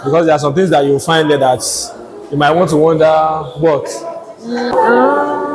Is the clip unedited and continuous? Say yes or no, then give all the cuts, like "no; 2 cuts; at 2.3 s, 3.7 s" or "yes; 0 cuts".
yes; 0 cuts